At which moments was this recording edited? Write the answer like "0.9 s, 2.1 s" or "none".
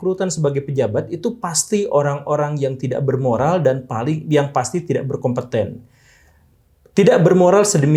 none